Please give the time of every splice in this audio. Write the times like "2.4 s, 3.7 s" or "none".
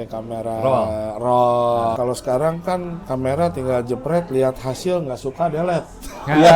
2.0 s